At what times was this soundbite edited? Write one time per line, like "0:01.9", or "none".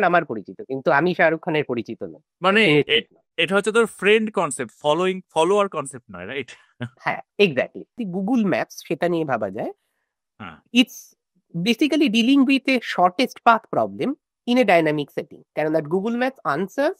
0:08.0